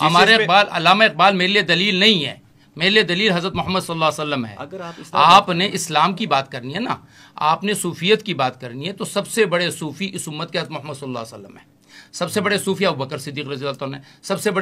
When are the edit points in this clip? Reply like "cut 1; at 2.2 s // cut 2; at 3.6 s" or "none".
none